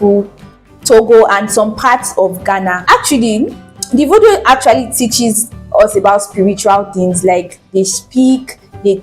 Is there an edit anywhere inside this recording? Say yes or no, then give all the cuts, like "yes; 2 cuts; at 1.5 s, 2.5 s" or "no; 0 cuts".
yes; 1 cut; at 2.8 s